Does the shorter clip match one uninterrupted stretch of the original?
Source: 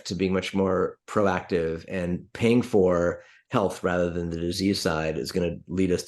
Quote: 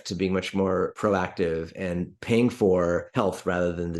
no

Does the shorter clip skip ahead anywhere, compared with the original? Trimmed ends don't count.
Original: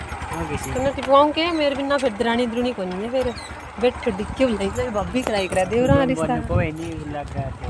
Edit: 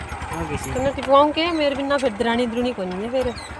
no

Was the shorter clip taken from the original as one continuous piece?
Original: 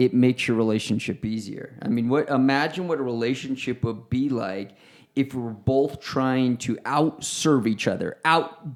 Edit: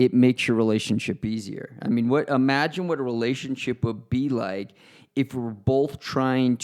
yes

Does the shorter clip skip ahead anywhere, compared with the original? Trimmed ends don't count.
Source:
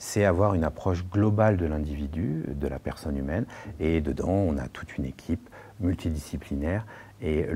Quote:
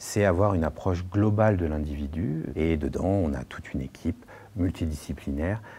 yes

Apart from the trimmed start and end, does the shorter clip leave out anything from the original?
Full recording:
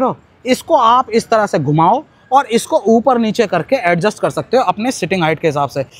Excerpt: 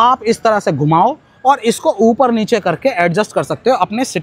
no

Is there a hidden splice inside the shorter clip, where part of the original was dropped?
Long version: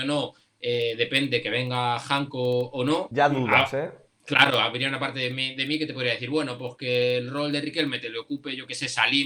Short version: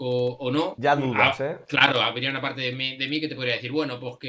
yes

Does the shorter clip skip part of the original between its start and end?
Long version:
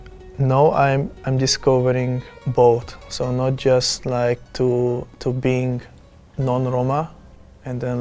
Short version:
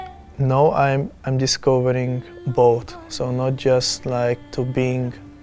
yes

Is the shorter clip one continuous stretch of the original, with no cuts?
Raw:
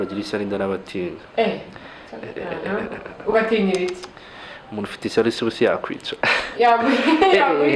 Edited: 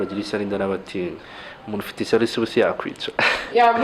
no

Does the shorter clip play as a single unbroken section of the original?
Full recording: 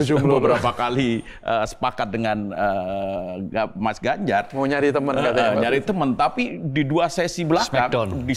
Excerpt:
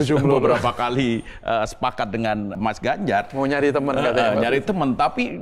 no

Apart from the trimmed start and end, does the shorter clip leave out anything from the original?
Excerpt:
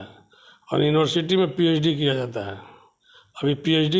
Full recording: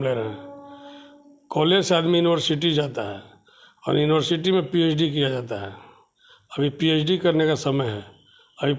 no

